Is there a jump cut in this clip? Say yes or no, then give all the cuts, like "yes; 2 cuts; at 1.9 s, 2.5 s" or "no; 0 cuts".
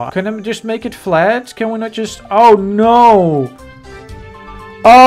no; 0 cuts